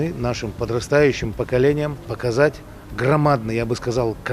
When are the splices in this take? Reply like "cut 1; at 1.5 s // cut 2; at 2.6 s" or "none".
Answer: cut 1; at 2.2 s